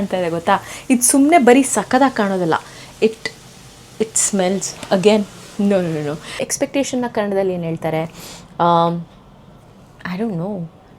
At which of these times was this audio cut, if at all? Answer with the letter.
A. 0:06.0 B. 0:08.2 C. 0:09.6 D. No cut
A